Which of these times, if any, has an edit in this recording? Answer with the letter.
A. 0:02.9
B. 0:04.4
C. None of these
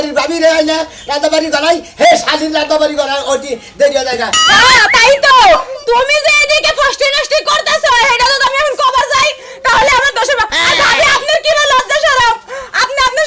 B